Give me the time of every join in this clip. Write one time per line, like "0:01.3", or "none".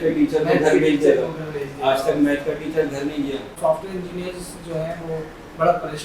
0:03.5